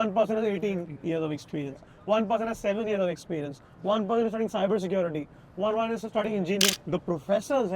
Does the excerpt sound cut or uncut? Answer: cut